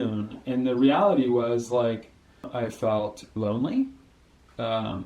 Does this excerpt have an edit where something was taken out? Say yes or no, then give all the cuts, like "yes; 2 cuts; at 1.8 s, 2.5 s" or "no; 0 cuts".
yes; 1 cut; at 2.5 s